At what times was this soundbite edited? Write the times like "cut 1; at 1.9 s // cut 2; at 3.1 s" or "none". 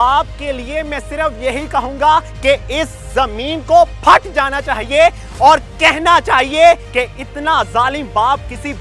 cut 1; at 2.3 s // cut 2; at 6.8 s